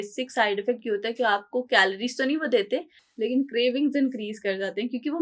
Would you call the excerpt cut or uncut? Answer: uncut